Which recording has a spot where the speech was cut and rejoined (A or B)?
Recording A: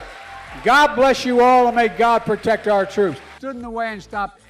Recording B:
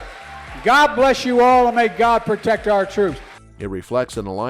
A